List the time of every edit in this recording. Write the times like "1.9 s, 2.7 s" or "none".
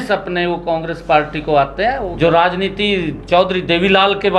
2.0 s